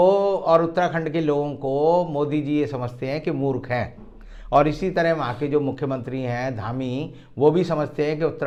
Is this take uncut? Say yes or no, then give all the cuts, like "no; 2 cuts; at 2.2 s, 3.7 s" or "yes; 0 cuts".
yes; 0 cuts